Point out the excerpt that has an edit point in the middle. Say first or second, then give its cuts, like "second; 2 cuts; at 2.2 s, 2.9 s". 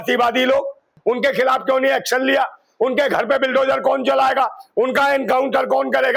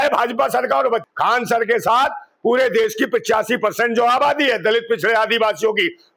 second; 1 cut; at 1.1 s